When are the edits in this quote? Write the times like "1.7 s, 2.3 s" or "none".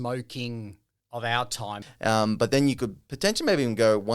1.8 s